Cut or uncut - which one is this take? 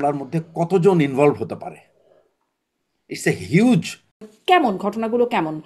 cut